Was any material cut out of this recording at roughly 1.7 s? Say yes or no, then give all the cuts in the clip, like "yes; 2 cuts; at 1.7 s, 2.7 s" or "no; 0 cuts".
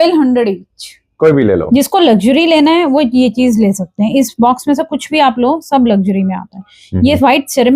yes; 1 cut; at 1.7 s